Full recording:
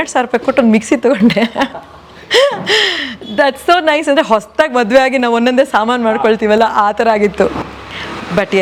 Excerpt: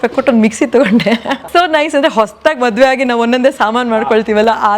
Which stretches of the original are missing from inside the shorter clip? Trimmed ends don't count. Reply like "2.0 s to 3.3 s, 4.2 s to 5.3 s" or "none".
1.7 s to 3.6 s